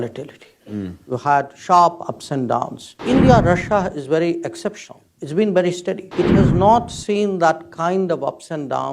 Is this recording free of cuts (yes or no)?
no